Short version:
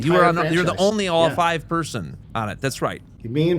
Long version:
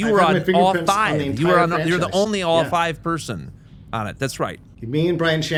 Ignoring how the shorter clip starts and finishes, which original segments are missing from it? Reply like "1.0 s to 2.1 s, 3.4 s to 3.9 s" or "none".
3.5 s to 3.8 s